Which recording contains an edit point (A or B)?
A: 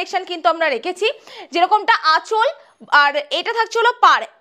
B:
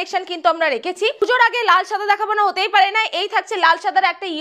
B